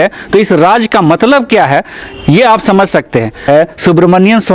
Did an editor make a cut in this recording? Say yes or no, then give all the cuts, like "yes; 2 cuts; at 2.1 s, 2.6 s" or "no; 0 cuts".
yes; 1 cut; at 3.4 s